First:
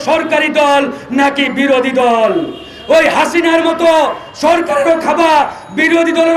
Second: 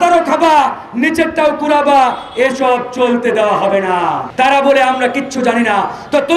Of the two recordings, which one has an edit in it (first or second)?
second